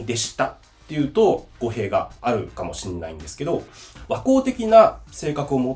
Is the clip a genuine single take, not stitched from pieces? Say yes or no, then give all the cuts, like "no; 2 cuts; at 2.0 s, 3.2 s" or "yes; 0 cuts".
no; 1 cut; at 2.1 s